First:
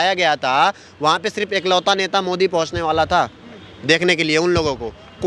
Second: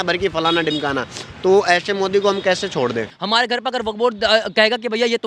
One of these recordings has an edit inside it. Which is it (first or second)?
second